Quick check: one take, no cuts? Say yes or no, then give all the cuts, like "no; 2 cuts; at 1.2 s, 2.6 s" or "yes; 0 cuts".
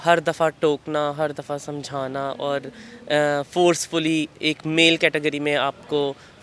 yes; 0 cuts